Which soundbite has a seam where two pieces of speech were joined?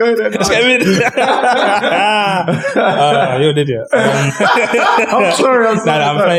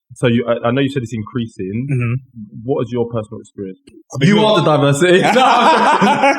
second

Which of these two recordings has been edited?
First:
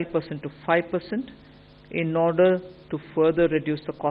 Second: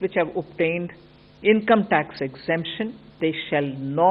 second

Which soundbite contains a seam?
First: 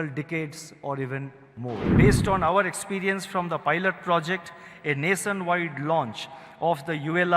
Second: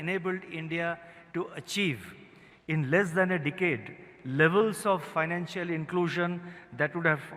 first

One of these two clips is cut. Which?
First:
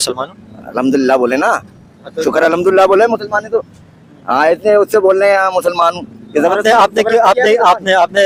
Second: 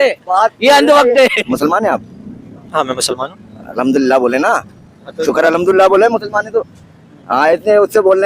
second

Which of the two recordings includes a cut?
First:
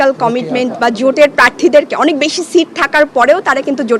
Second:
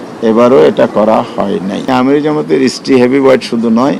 second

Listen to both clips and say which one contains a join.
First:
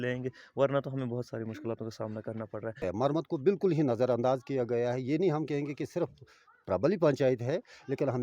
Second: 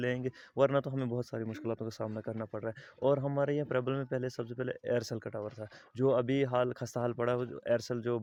first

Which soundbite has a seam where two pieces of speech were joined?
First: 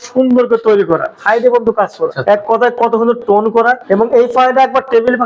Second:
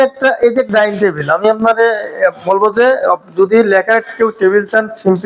first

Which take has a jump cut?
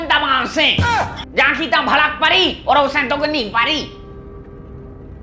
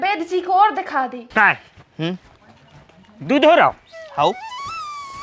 second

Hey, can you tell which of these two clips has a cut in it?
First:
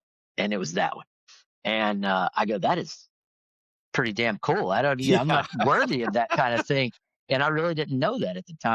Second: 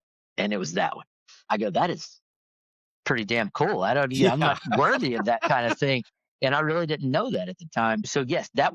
second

